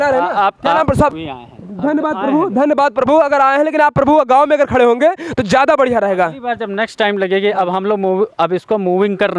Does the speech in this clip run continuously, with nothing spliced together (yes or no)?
no